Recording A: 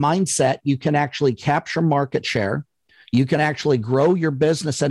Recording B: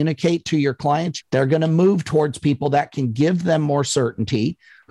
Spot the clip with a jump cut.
B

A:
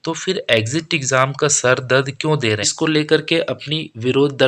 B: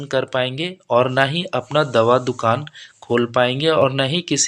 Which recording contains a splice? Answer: A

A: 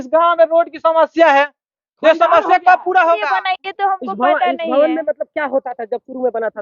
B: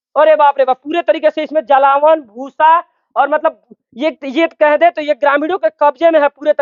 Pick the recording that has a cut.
A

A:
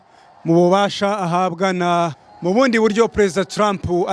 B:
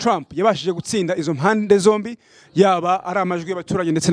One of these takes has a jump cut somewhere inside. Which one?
A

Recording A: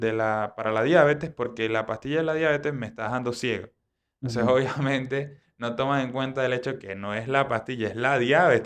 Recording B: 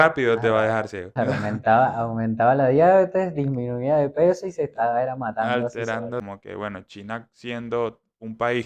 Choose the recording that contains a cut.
B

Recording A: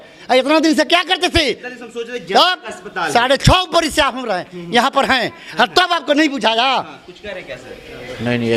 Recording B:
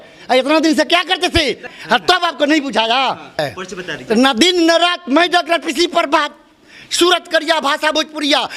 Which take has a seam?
B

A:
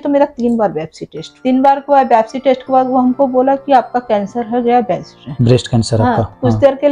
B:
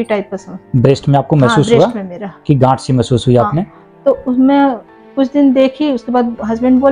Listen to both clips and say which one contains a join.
A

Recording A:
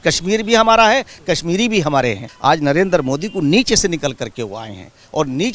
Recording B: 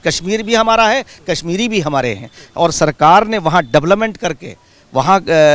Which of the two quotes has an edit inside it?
A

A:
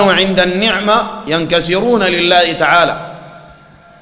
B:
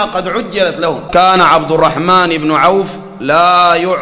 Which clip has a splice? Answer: B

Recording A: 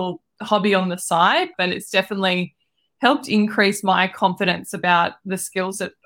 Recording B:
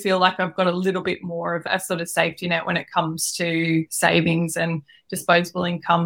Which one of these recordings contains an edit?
A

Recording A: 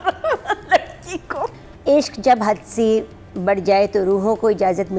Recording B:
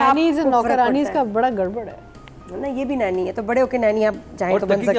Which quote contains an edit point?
A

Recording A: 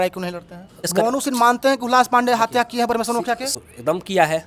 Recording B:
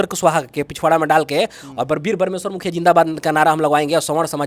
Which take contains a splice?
A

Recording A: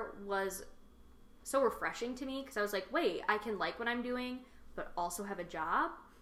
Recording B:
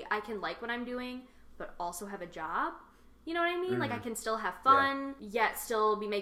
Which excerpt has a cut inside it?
B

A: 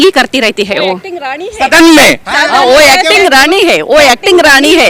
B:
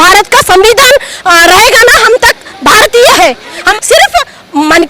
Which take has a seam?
B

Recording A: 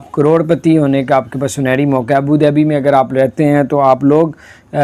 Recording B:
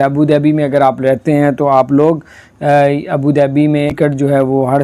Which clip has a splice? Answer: B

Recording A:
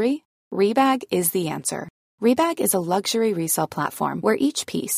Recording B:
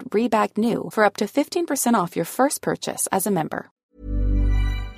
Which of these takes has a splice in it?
B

